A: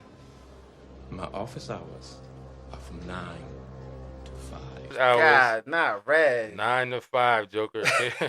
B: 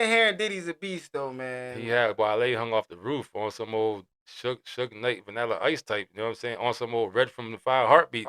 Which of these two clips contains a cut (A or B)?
A